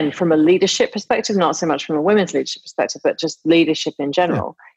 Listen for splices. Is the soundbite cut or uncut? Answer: uncut